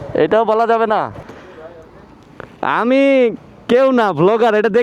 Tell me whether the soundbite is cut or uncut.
cut